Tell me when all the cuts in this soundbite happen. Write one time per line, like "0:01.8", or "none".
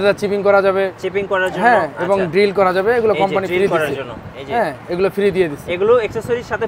none